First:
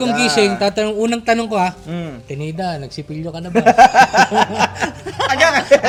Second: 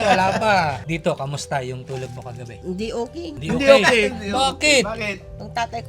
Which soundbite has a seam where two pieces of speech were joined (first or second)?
second